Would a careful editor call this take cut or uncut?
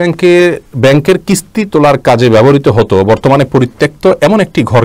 uncut